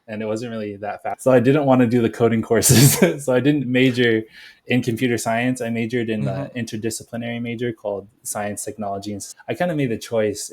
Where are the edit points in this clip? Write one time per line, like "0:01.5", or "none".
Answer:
0:01.2
0:09.3